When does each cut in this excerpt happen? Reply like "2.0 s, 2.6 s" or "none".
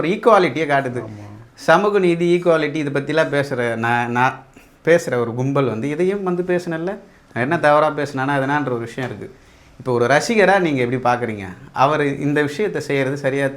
none